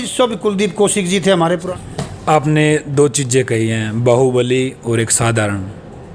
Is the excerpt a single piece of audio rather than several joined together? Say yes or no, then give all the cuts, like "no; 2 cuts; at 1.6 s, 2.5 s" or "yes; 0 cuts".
no; 1 cut; at 1.7 s